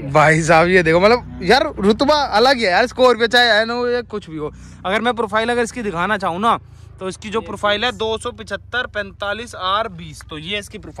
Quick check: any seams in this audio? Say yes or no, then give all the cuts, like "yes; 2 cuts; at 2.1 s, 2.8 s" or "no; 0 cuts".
no; 0 cuts